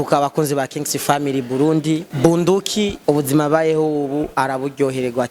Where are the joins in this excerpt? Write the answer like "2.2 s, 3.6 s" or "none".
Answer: 2.1 s, 3.0 s